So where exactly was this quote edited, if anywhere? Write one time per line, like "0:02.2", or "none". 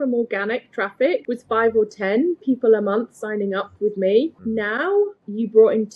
0:01.2
0:05.0